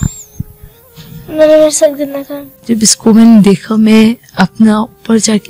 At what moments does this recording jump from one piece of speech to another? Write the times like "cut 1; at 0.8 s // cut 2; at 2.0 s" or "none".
cut 1; at 2.5 s